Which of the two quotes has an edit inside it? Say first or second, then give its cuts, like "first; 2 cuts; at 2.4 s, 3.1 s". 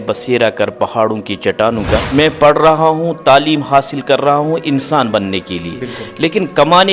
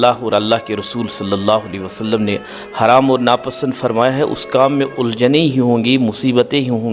first; 1 cut; at 2.1 s